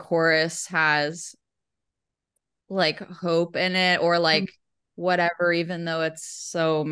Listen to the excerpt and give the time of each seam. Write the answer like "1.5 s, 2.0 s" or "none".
none